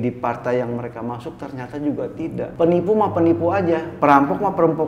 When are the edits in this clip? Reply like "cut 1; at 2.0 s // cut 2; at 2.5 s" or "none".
cut 1; at 2.5 s // cut 2; at 3.9 s